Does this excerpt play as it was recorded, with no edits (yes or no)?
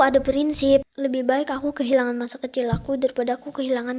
no